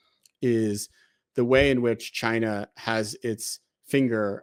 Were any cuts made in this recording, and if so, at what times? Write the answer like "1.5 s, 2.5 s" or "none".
none